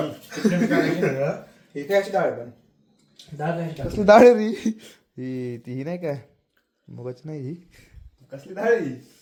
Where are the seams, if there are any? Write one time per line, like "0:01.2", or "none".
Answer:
none